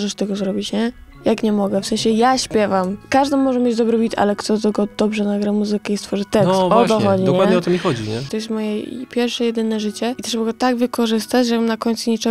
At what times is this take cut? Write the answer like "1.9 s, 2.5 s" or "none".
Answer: 3.0 s, 8.3 s, 10.2 s